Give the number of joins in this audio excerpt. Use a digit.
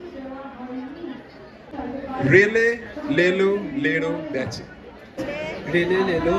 2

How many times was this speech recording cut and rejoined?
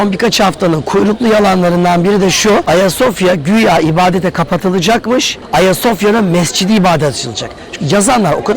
2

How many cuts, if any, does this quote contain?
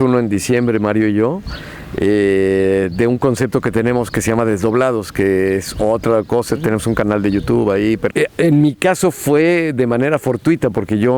1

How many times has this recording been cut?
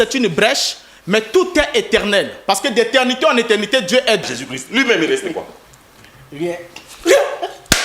1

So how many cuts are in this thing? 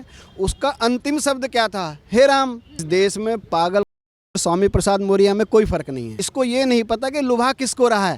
2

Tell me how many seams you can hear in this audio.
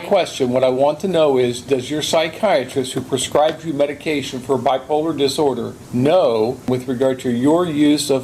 2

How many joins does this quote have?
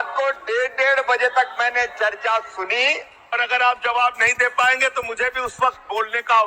1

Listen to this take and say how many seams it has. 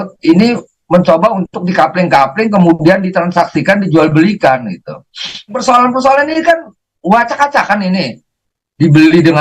1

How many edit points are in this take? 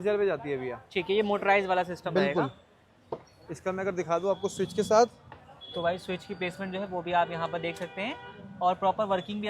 0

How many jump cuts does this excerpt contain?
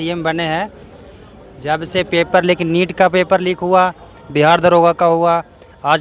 0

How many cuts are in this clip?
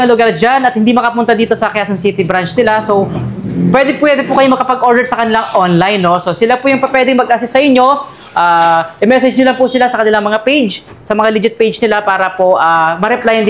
0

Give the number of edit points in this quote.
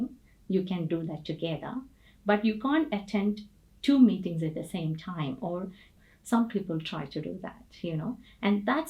1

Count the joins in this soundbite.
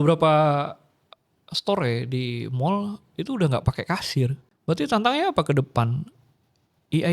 1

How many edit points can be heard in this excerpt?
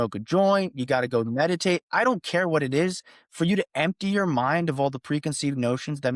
0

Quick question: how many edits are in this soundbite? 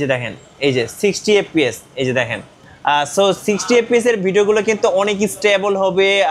0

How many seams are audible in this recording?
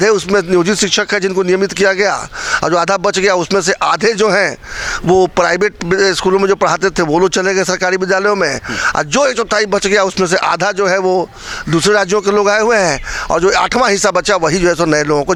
0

